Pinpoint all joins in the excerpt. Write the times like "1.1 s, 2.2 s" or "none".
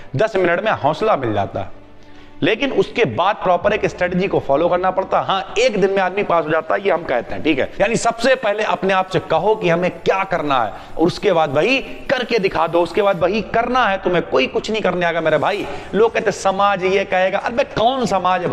7.7 s